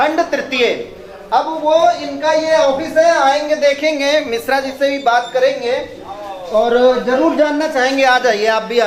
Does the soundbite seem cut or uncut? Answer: uncut